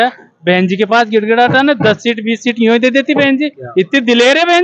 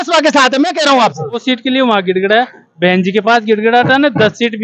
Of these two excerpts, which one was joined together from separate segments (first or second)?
second